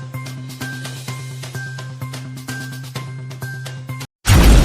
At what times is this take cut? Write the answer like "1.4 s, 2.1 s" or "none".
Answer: none